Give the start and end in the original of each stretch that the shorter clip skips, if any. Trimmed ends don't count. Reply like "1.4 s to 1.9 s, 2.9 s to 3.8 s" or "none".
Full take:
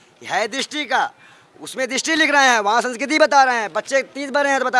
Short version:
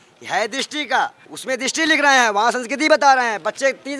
1.3 s to 1.6 s